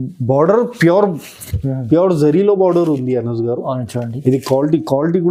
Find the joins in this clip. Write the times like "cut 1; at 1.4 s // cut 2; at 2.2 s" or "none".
none

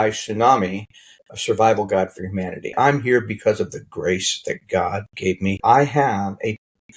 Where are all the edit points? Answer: cut 1; at 2.7 s // cut 2; at 5.6 s

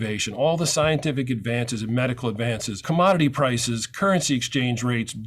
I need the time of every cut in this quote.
cut 1; at 2.8 s

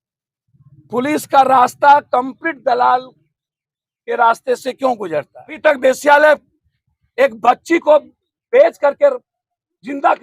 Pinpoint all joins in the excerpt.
cut 1; at 5.6 s

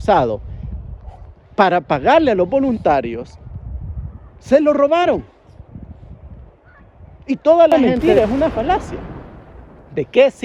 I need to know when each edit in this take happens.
cut 1; at 7.7 s

